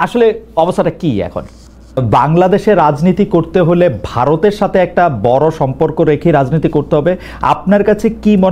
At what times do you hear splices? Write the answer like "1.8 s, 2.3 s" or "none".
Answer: 2.0 s